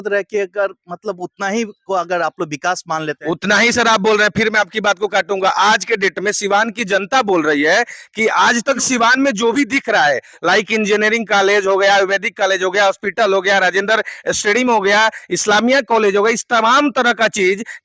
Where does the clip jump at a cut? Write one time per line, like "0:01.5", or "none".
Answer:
none